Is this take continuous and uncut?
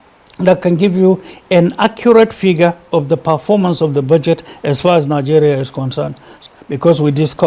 no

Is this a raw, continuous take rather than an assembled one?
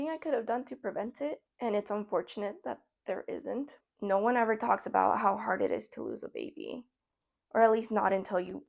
no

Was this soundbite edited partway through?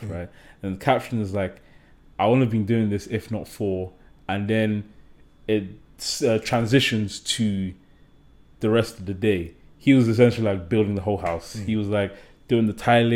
no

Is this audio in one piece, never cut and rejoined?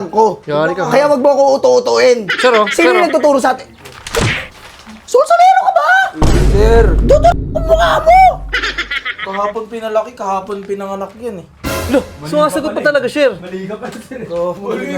yes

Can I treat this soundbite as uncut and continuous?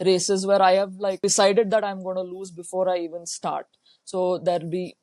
no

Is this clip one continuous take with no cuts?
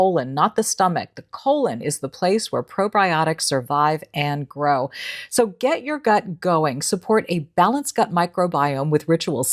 yes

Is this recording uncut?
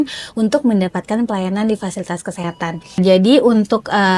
no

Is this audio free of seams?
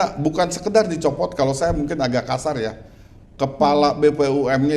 yes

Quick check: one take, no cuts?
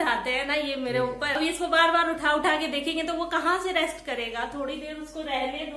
no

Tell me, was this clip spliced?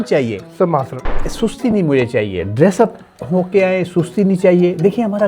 yes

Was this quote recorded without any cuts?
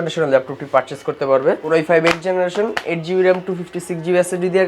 no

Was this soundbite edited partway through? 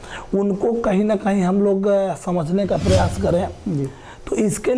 no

